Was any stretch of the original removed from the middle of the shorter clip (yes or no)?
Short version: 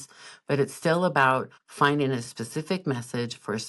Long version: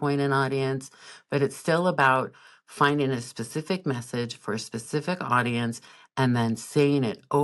yes